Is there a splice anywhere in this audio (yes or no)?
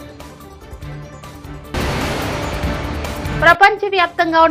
no